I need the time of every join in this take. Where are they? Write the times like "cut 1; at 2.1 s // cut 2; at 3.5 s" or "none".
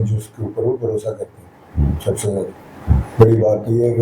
none